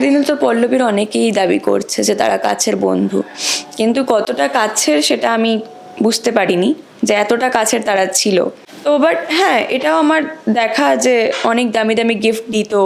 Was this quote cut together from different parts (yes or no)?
no